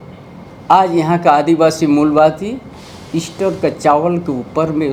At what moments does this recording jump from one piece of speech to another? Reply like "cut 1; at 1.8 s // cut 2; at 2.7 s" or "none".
none